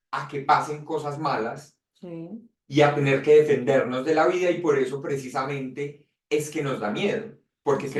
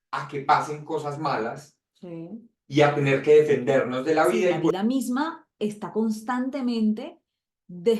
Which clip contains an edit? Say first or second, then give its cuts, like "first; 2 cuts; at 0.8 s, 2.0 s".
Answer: second; 1 cut; at 4.7 s